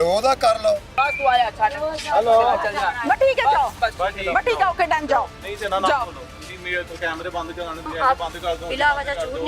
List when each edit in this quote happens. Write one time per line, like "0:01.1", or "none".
0:00.9
0:03.8
0:07.8